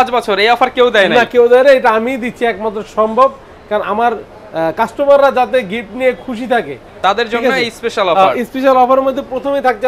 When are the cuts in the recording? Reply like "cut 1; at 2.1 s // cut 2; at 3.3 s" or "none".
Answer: none